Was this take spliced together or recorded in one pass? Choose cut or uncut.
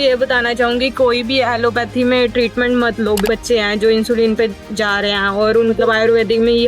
cut